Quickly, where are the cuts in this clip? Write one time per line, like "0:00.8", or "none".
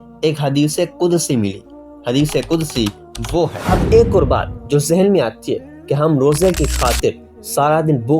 0:03.6

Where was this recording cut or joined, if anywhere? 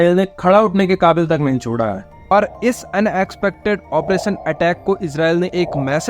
0:02.3

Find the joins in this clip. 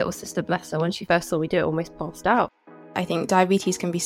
0:02.9

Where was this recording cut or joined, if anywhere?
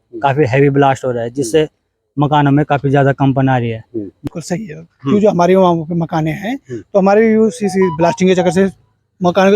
0:04.2

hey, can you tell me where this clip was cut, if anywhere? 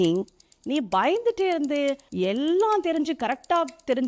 0:02.0

